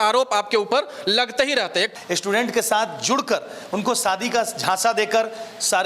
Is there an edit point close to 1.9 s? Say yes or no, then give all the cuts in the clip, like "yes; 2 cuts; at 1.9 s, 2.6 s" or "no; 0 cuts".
yes; 1 cut; at 1.9 s